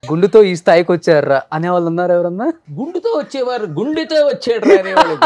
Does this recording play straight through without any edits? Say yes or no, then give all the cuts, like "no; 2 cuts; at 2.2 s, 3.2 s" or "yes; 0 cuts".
no; 1 cut; at 2.6 s